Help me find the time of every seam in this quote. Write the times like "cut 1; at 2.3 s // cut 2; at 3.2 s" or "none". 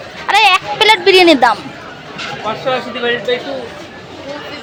none